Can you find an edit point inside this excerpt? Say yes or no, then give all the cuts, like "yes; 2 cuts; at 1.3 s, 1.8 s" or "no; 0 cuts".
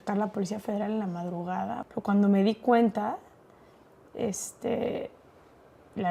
yes; 1 cut; at 1.8 s